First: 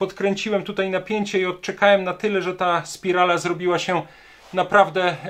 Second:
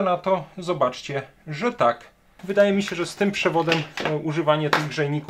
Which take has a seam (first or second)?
second